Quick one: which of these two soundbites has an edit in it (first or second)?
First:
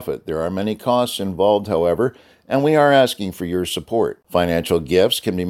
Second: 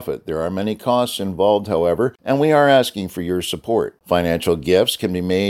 second